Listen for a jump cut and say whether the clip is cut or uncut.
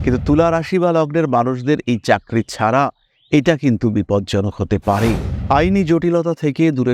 cut